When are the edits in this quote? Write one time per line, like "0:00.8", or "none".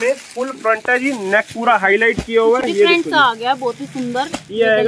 none